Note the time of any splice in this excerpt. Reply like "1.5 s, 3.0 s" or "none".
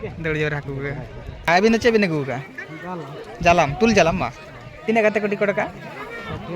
1.5 s